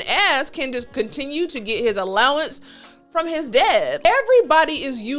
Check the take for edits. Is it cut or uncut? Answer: cut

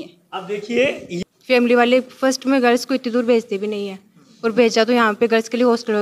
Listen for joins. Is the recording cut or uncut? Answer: cut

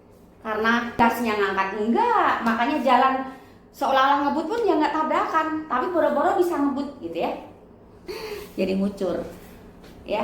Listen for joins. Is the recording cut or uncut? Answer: cut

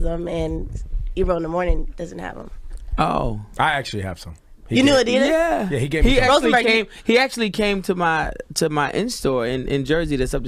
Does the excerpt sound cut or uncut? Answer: cut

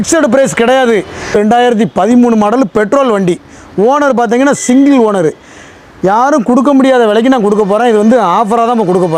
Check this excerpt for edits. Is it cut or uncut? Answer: cut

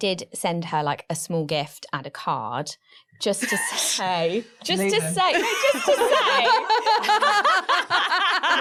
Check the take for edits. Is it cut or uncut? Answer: uncut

